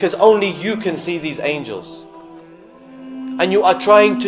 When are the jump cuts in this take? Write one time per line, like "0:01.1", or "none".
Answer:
none